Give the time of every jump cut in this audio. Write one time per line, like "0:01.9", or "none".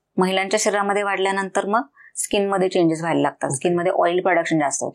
none